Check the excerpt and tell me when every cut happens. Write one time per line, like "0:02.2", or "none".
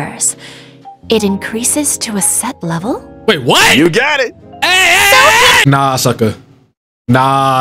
none